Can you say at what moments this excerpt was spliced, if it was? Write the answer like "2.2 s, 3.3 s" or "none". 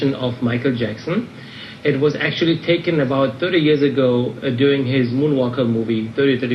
none